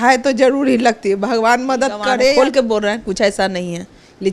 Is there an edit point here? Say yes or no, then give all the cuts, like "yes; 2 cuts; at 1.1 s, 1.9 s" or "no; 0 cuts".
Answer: yes; 1 cut; at 2.1 s